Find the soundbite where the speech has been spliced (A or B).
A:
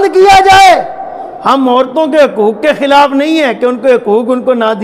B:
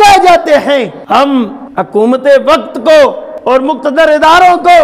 B